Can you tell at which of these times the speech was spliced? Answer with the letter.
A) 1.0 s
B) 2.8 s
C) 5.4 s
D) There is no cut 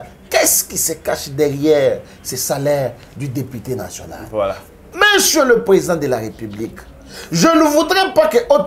D